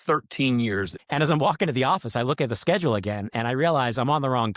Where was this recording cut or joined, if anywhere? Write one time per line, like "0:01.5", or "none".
0:00.9